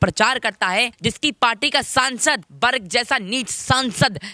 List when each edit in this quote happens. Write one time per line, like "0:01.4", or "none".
0:00.9
0:02.5